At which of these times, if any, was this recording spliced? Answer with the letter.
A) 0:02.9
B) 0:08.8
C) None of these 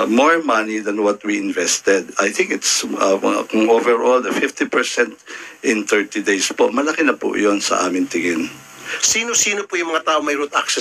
B